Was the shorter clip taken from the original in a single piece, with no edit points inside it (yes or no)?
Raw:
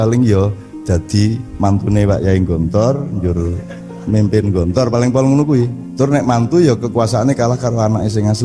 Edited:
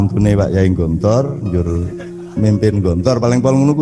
yes